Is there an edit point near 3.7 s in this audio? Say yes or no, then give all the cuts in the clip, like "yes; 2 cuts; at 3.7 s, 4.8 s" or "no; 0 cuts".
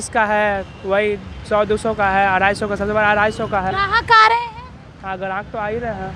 yes; 1 cut; at 3.7 s